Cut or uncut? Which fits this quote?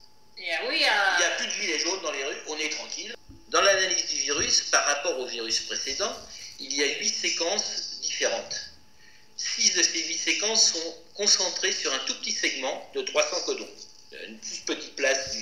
cut